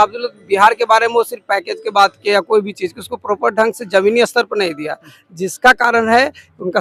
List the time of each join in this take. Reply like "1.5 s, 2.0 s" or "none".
none